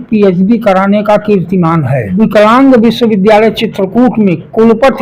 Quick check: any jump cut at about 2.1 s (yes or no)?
yes